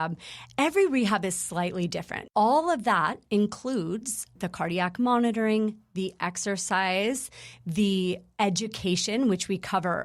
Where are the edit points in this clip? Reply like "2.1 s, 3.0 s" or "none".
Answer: 2.2 s